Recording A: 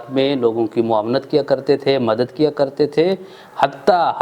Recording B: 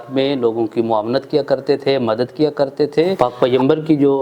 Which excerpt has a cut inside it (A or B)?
B